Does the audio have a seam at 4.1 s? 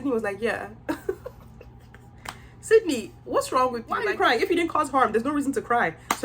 yes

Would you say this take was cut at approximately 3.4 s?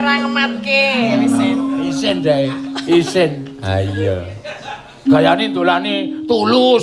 no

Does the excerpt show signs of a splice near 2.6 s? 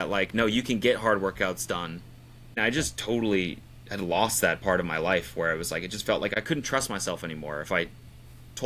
yes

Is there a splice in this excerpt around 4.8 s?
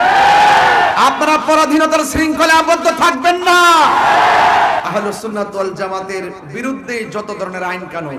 yes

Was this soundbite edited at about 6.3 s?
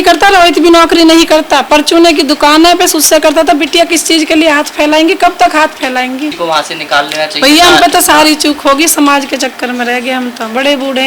yes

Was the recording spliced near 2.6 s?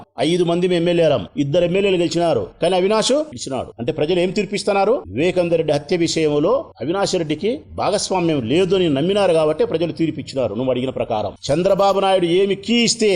no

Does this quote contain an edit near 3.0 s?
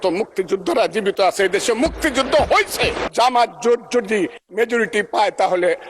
yes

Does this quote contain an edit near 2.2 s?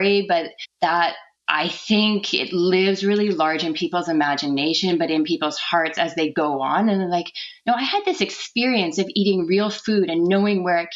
no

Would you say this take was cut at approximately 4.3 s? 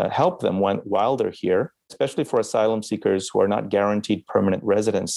no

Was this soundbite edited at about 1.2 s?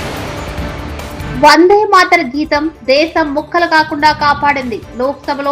yes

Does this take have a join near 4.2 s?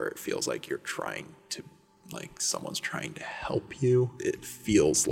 yes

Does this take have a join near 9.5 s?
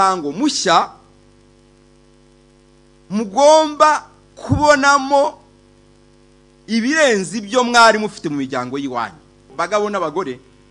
yes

